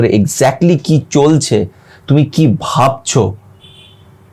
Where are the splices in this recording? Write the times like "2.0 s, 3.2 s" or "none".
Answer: none